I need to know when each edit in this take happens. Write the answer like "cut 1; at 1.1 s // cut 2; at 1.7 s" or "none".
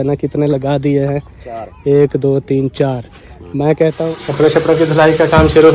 cut 1; at 4.0 s